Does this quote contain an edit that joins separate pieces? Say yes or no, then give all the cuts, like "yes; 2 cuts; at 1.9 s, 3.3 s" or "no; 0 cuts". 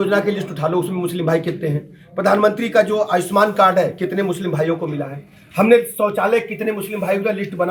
no; 0 cuts